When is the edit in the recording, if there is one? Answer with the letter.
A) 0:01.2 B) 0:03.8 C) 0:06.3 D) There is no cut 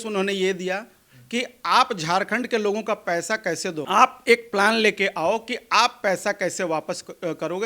B